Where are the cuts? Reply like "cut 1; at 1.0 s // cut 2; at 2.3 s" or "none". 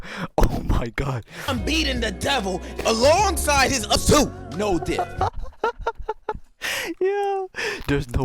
cut 1; at 4.0 s // cut 2; at 6.4 s